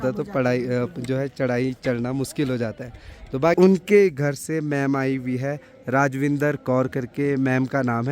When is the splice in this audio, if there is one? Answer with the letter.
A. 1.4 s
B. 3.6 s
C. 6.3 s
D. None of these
B